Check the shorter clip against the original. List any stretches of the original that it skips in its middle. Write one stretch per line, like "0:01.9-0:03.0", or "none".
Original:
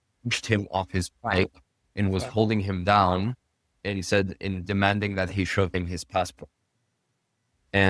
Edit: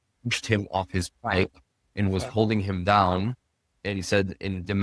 none